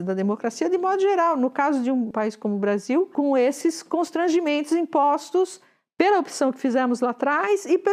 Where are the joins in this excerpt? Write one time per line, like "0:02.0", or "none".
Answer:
0:02.1
0:03.1